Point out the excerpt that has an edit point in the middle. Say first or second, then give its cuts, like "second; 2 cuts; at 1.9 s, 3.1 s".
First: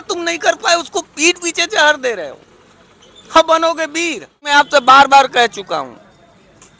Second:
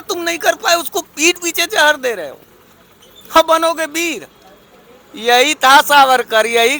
first; 1 cut; at 4.5 s